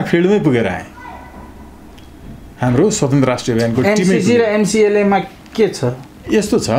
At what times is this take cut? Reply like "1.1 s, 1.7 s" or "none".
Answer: none

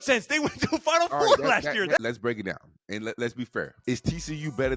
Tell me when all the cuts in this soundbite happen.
2.0 s, 3.7 s

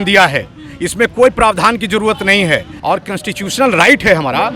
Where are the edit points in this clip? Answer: 2.7 s

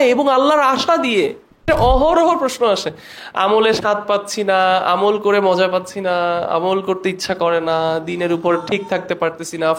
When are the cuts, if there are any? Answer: 1.6 s

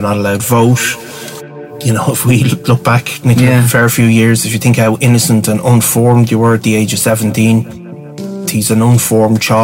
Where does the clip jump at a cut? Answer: 1.3 s, 8.4 s

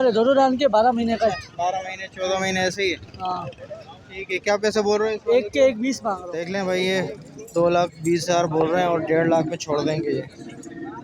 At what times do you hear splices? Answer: 6.3 s

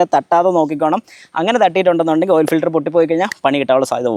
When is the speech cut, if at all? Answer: none

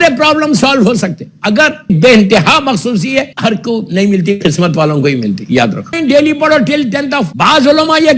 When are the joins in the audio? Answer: 1.9 s, 3.3 s, 6.0 s, 7.3 s

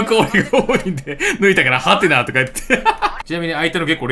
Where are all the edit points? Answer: 3.2 s

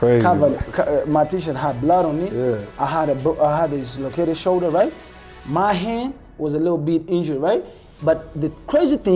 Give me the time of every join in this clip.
none

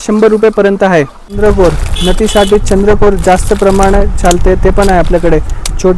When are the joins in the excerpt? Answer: 1.4 s

